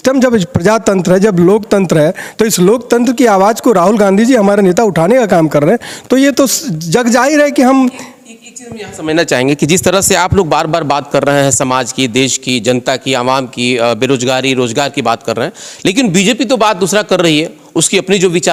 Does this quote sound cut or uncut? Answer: uncut